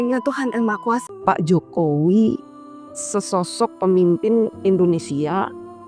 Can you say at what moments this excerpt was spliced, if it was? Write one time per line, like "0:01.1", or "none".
0:01.0